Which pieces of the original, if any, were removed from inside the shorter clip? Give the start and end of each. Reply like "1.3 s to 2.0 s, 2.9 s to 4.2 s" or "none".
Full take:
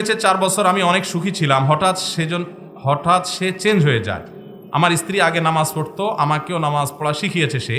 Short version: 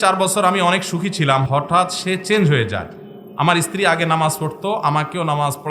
1.6 s to 2.8 s

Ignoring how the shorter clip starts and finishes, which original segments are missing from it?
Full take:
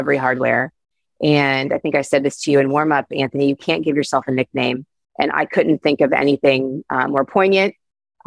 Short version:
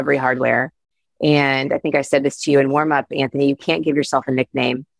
none

